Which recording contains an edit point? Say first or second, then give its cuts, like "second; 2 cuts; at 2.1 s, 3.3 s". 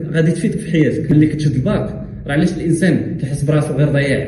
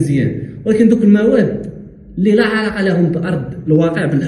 first; 1 cut; at 1.1 s